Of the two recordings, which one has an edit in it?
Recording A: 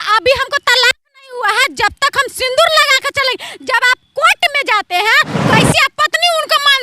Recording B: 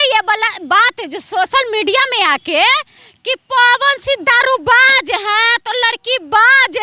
A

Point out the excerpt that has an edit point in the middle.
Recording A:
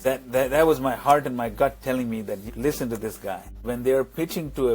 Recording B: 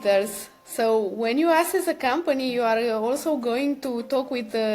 A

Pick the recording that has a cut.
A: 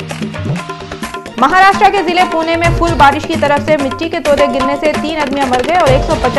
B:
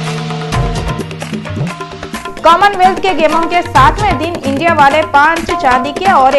A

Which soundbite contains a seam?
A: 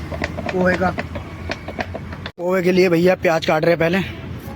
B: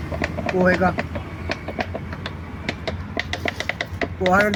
A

